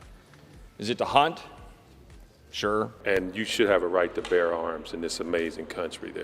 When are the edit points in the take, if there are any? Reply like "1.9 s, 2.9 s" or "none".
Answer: 3.0 s